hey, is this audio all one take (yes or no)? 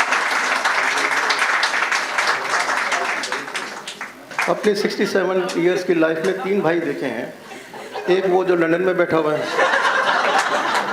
no